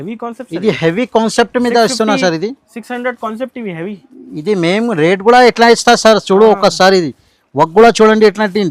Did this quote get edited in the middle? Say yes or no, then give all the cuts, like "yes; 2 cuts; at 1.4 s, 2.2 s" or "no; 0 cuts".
no; 0 cuts